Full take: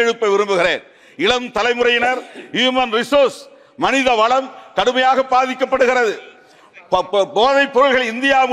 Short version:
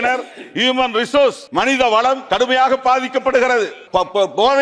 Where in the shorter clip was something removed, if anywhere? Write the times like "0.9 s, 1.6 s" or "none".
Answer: 1.4 s, 2.2 s, 3.8 s